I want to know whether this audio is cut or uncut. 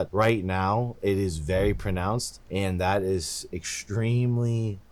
uncut